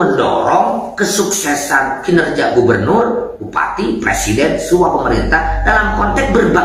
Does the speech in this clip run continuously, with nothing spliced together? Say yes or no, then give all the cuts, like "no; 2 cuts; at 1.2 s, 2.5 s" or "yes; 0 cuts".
yes; 0 cuts